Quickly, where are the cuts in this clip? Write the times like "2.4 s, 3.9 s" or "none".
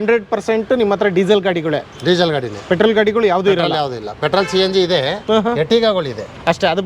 none